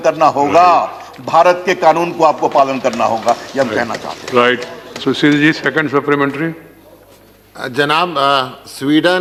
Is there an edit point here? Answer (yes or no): no